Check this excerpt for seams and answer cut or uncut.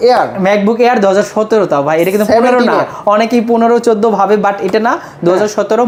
uncut